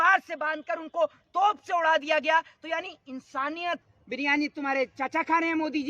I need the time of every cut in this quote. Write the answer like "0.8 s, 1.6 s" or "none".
3.8 s